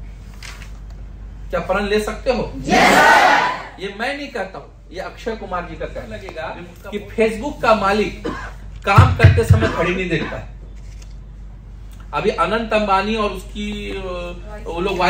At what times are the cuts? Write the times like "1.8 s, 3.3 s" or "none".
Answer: 6.6 s

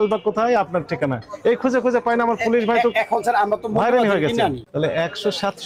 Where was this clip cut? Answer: 4.6 s

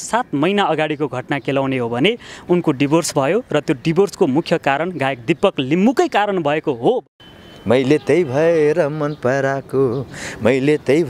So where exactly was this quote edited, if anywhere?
7.1 s

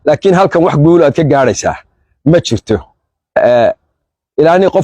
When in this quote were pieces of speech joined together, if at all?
3.4 s

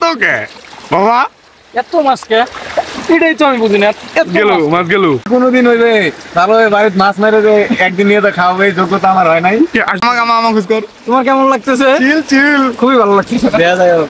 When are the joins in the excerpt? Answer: 5.5 s, 10.0 s

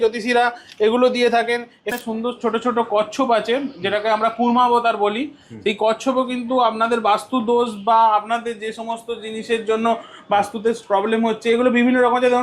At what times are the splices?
1.9 s

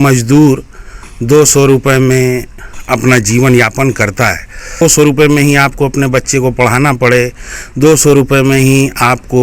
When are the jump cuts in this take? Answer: 4.8 s

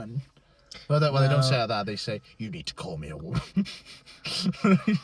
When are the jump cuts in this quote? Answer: none

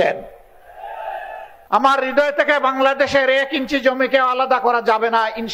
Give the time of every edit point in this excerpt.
1.5 s

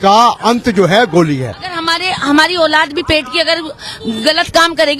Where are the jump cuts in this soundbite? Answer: 1.8 s

